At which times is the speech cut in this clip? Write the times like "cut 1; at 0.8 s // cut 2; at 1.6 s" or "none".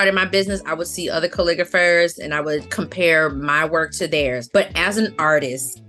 cut 1; at 4.4 s